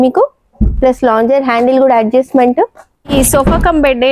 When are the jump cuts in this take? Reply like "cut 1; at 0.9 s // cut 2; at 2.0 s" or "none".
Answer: cut 1; at 3.1 s